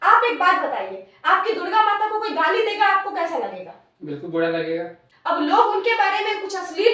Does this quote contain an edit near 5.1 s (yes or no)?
yes